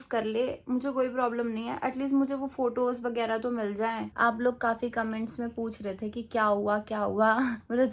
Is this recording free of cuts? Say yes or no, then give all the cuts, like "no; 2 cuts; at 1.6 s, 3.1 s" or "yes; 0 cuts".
no; 1 cut; at 4.1 s